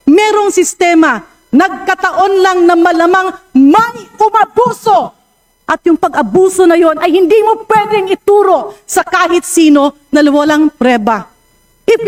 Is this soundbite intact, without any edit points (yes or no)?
yes